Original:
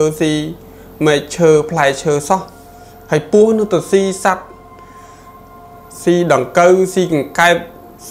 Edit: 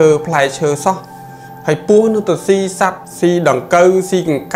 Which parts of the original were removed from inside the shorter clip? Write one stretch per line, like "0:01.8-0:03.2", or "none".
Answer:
0:04.5-0:05.9